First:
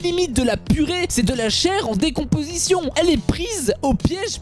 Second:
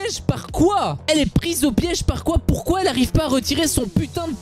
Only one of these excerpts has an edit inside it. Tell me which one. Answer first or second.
first